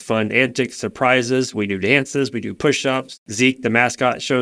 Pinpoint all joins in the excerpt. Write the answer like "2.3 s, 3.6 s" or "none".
3.2 s

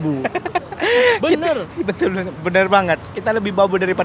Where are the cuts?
none

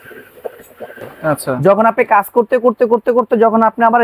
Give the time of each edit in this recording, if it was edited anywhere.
1.1 s

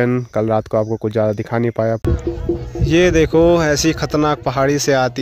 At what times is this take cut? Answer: 2.0 s

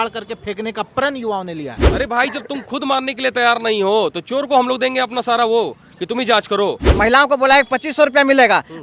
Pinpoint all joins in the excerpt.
1.8 s, 6.9 s

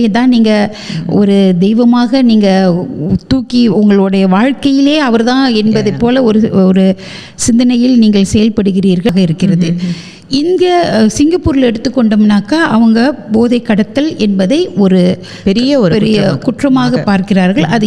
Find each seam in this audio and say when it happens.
9.1 s

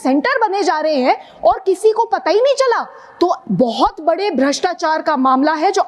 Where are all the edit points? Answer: none

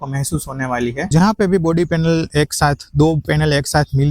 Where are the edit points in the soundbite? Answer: 1.0 s

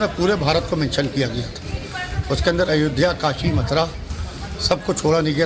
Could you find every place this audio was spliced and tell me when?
none

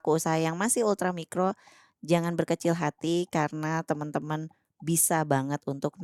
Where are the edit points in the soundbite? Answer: none

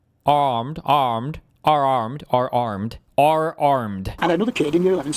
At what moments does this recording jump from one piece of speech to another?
4.0 s

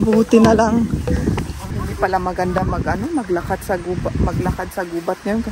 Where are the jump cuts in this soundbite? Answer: 1.7 s

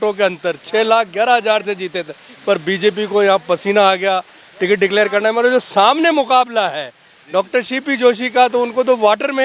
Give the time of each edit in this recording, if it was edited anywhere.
none

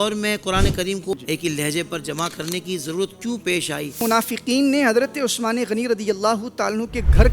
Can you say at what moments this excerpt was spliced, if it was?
1.1 s, 4.0 s

